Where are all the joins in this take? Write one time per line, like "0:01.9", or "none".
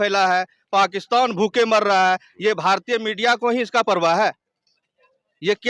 none